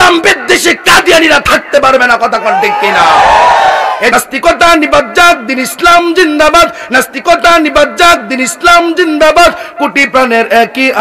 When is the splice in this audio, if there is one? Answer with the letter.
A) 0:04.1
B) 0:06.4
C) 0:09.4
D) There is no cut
A